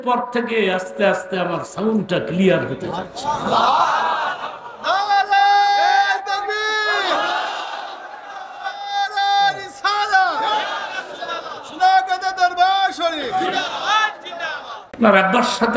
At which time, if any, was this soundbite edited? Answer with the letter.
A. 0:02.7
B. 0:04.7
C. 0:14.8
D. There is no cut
C